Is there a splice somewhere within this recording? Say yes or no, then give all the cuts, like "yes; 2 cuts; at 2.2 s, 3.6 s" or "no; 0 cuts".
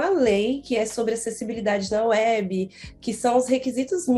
no; 0 cuts